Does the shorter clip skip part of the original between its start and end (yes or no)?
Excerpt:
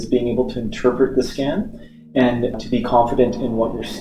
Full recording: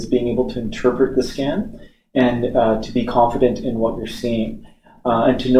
yes